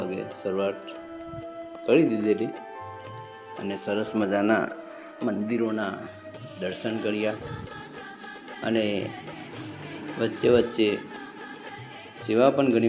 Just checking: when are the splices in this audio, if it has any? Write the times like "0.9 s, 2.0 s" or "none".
none